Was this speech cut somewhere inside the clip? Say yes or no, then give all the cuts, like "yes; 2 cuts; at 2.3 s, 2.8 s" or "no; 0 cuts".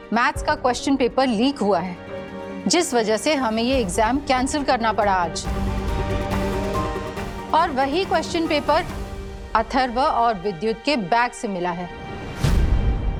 no; 0 cuts